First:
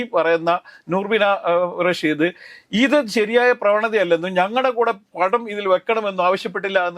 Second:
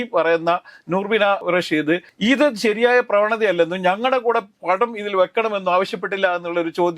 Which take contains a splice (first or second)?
second